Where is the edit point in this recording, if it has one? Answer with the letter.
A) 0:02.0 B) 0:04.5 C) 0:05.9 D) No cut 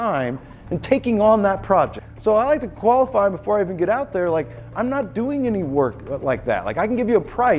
A